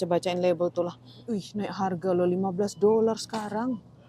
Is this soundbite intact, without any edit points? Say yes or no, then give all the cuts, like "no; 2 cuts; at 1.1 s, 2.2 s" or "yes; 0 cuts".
no; 1 cut; at 1.5 s